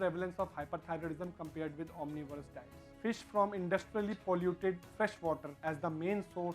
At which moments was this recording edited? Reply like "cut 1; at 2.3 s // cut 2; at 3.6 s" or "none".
cut 1; at 2.9 s